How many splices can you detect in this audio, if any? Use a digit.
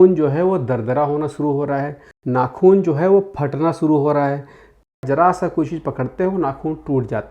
2